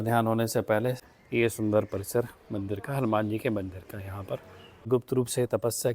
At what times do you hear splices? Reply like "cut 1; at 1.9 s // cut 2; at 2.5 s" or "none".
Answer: cut 1; at 1.1 s // cut 2; at 4.9 s